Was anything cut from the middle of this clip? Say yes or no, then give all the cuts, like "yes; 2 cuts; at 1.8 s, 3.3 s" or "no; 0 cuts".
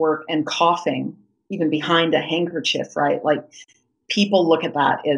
no; 0 cuts